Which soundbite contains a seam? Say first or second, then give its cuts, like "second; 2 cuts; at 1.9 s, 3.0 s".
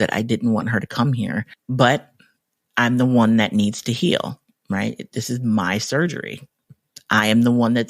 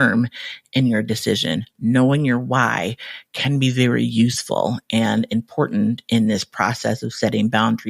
first; 1 cut; at 1.6 s